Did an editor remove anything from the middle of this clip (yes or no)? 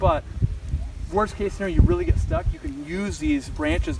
no